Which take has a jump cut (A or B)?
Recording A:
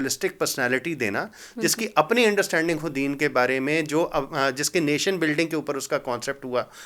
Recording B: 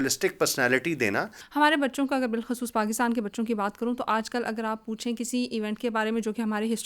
B